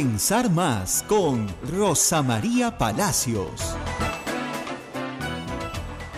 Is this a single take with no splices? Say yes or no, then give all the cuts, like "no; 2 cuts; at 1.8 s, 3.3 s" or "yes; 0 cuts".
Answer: yes; 0 cuts